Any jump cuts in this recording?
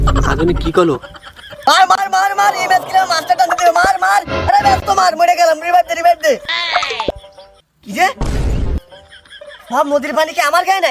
yes; 1 cut; at 1.5 s

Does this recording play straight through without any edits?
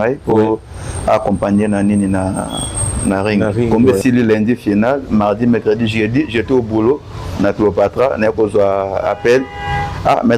no; 1 cut; at 3.7 s

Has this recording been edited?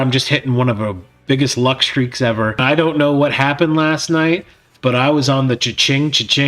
yes; 1 cut; at 2.6 s

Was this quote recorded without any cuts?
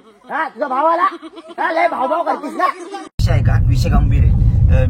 no; 1 cut; at 3.2 s

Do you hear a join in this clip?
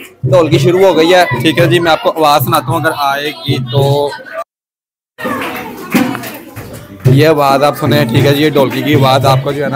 no; 0 cuts

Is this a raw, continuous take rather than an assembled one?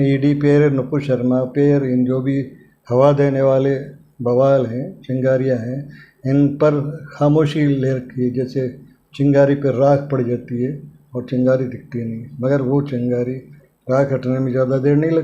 yes; 0 cuts

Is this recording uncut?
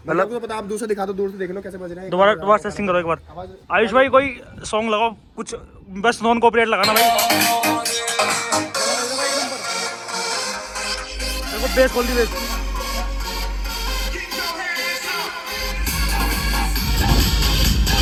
yes; 0 cuts

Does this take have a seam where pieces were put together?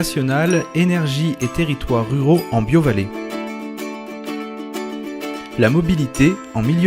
yes; 2 cuts; at 3.1 s, 4.9 s

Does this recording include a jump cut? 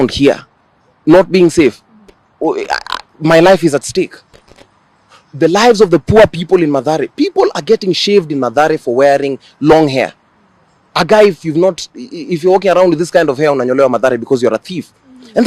no; 0 cuts

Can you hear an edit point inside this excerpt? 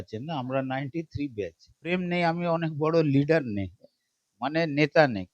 yes; 1 cut; at 1.9 s

